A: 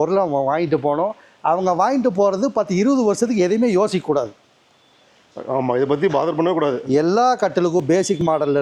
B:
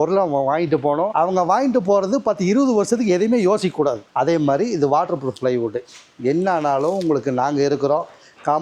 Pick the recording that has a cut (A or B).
B